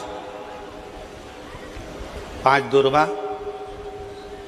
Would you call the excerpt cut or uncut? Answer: uncut